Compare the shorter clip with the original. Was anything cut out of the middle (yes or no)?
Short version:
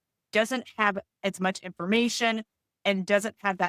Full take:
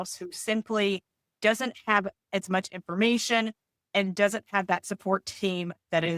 no